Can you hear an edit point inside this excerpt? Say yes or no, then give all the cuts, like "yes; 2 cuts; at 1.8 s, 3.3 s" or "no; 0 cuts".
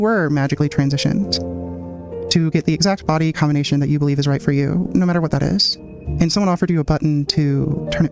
no; 0 cuts